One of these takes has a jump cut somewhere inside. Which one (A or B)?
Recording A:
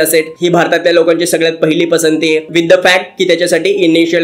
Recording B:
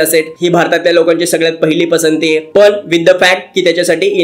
A